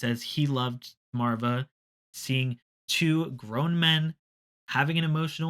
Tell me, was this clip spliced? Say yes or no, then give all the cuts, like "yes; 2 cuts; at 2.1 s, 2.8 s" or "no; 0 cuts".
yes; 2 cuts; at 1.1 s, 2.0 s